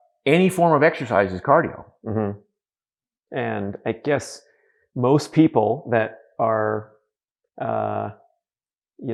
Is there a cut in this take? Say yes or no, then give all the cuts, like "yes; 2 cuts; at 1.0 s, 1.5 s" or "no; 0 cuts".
no; 0 cuts